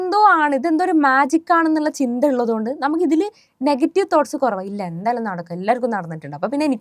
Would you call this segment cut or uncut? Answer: uncut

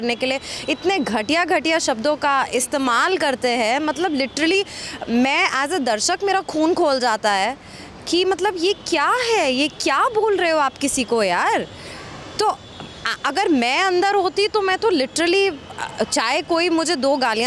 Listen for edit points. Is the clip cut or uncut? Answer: uncut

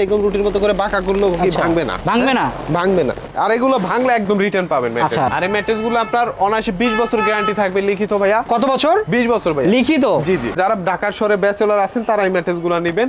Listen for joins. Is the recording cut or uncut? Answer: cut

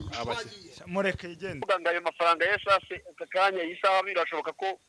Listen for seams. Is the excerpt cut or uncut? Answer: cut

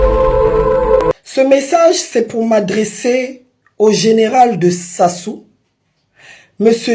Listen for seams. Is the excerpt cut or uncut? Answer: cut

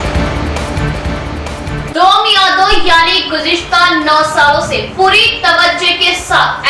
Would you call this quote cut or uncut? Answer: cut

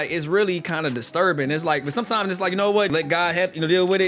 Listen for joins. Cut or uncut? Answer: cut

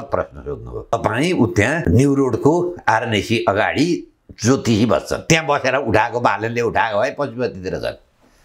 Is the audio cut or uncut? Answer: cut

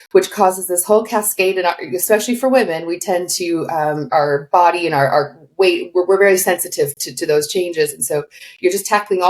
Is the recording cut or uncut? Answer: cut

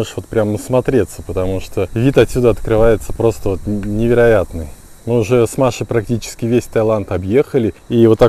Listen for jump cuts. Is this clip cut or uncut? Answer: uncut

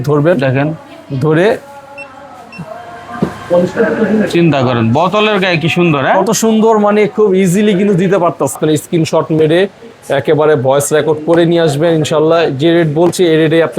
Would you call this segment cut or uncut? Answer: cut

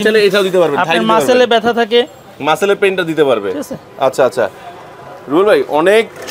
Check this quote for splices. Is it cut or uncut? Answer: uncut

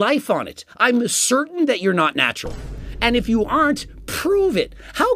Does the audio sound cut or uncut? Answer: uncut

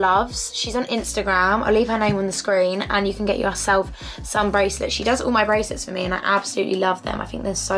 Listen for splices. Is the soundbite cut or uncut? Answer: uncut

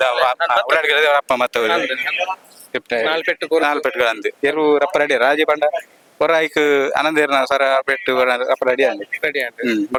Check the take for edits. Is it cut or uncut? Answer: uncut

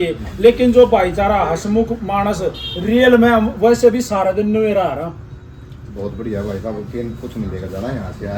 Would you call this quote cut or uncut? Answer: uncut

